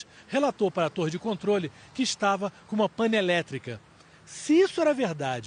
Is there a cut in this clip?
no; 0 cuts

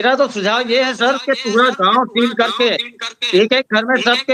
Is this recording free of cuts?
yes; 0 cuts

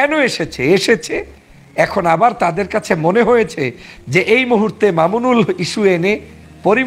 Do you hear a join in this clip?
no; 0 cuts

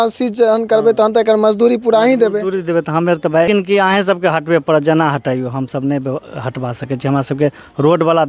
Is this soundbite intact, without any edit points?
no; 1 cut; at 3.5 s

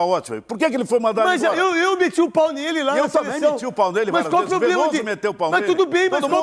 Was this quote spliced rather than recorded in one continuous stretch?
no; 0 cuts

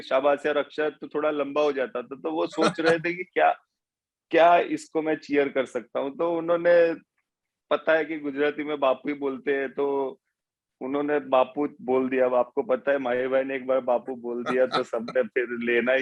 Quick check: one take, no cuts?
yes; 0 cuts

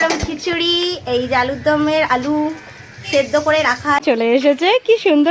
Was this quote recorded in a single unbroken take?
no; 1 cut; at 4.0 s

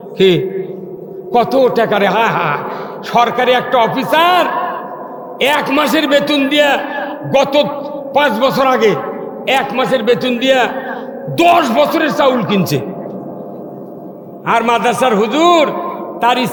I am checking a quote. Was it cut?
no; 0 cuts

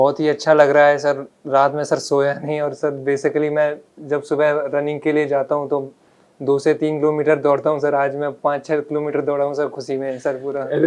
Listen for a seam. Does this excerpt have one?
no; 0 cuts

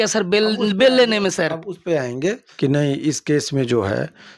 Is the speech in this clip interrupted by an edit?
yes; 1 cut; at 2.5 s

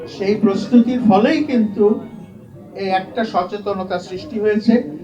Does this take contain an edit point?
no; 0 cuts

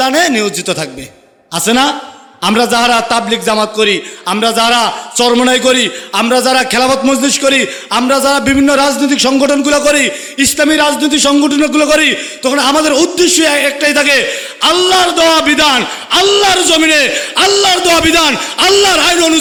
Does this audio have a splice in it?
no; 0 cuts

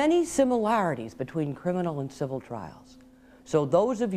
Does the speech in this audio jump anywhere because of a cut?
no; 0 cuts

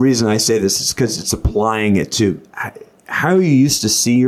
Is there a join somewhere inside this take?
no; 0 cuts

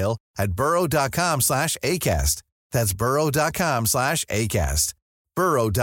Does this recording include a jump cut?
no; 0 cuts

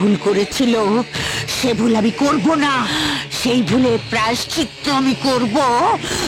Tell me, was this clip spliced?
no; 0 cuts

